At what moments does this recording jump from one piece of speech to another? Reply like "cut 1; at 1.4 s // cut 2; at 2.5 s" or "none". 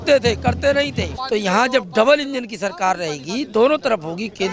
cut 1; at 1.1 s